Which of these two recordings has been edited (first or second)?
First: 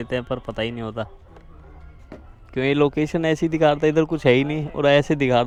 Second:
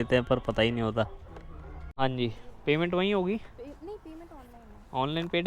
second